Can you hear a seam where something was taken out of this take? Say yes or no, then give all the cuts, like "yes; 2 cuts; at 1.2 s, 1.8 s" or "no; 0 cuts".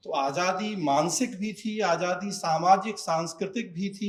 no; 0 cuts